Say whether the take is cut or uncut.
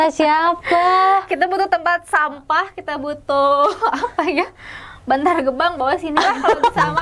uncut